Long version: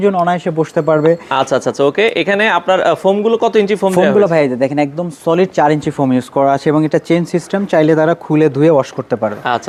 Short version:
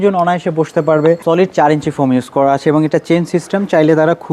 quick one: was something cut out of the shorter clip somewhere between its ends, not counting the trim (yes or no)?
yes